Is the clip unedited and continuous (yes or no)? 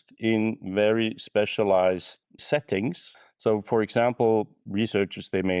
no